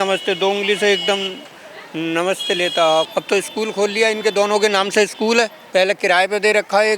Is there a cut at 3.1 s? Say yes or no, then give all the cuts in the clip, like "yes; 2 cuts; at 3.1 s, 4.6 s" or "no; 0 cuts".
yes; 2 cuts; at 3.1 s, 5.6 s